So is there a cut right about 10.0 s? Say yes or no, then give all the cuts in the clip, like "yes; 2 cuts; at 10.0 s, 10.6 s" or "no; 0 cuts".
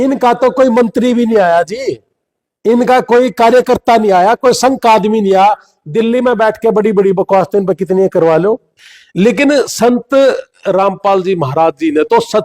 no; 1 cut; at 8.7 s